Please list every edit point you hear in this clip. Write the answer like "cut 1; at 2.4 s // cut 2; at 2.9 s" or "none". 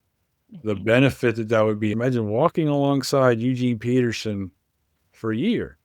cut 1; at 1.9 s